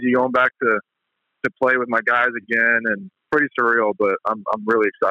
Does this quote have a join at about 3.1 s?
yes; 1 cut; at 3.1 s

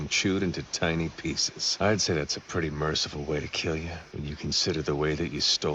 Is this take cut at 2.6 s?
no; 2 cuts; at 1.4 s, 4.0 s

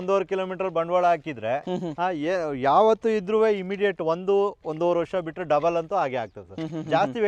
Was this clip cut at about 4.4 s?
no; 0 cuts

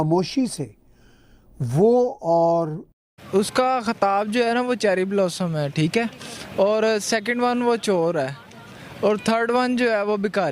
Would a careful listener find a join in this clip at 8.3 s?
no; 1 cut; at 2.9 s

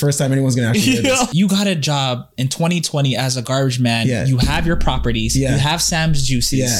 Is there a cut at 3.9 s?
no; 1 cut; at 1.3 s

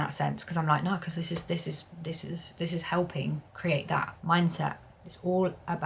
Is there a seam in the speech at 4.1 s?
yes; 2 cuts; at 3.5 s, 4.1 s

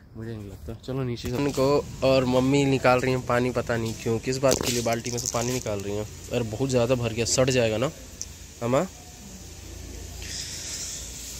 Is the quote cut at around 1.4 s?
yes; 1 cut; at 1.4 s

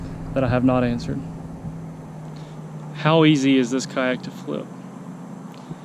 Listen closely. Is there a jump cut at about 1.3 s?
no; 0 cuts

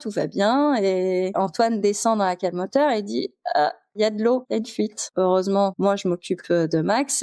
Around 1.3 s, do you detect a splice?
yes; 3 cuts; at 1.3 s, 3.9 s, 5.1 s

